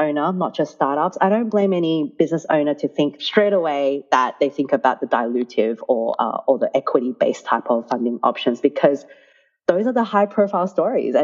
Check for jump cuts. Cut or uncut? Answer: cut